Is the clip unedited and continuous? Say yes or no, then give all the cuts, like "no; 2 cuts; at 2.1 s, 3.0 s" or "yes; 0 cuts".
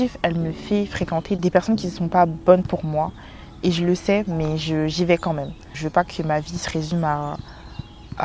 no; 2 cuts; at 1.4 s, 5.8 s